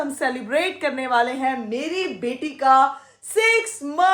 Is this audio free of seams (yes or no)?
yes